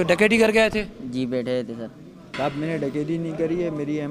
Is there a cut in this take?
yes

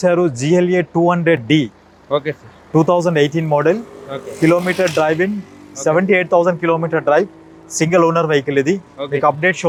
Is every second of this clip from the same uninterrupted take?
yes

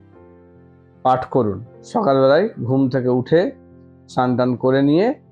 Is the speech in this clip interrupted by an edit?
no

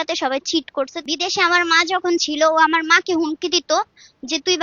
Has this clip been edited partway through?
yes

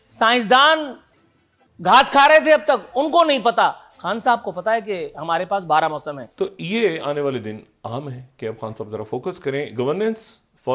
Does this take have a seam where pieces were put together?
yes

